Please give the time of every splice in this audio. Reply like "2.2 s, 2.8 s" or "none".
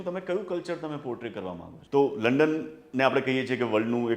1.7 s

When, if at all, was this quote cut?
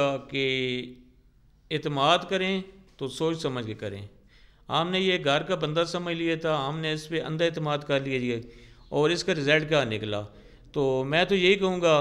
none

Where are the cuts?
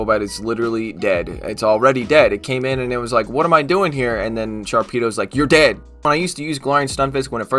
6.0 s

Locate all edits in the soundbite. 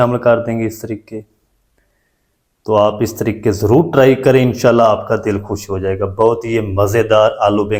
none

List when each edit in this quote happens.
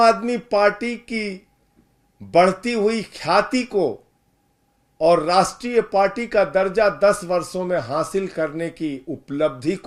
none

